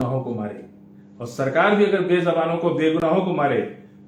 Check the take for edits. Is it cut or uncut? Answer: uncut